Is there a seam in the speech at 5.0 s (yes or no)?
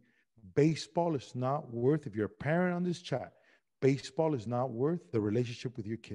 yes